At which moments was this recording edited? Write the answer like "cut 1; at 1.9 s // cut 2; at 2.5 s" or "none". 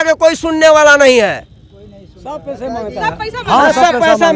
none